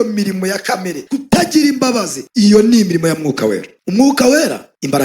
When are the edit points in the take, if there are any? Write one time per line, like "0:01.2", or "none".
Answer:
0:01.0
0:02.2